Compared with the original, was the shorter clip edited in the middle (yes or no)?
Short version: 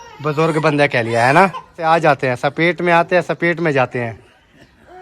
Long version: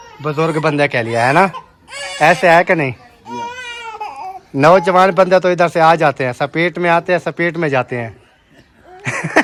yes